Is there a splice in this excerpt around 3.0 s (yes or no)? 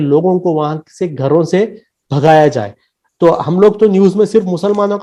no